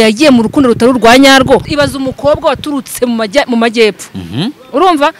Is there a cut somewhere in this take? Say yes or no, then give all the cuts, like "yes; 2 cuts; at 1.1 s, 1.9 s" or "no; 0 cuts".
yes; 1 cut; at 1.7 s